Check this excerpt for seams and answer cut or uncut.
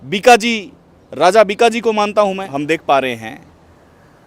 cut